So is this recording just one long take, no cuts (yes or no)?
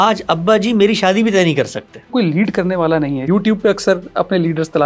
no